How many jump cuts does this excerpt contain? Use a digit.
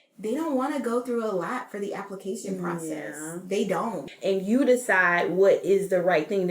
1